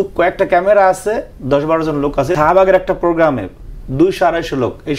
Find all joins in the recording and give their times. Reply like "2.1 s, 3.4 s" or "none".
2.4 s